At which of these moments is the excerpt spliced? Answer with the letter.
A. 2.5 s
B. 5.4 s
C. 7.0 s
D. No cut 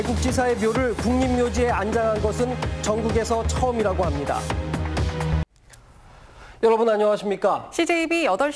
B